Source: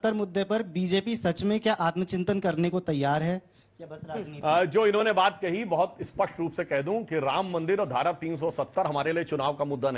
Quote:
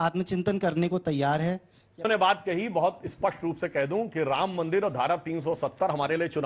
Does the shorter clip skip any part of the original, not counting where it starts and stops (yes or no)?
yes